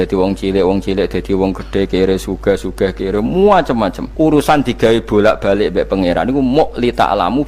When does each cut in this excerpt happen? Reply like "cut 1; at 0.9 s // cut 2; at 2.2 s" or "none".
cut 1; at 4.0 s